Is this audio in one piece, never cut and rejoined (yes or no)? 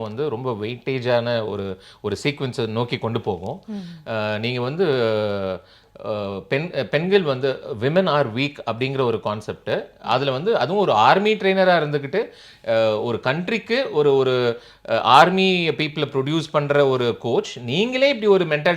yes